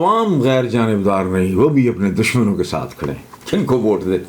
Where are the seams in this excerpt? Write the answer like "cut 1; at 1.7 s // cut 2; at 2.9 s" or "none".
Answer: cut 1; at 3.3 s